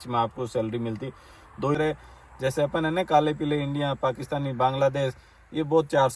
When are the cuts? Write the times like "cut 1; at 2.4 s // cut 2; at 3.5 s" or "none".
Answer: cut 1; at 1.8 s